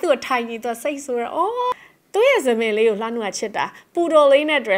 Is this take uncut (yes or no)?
no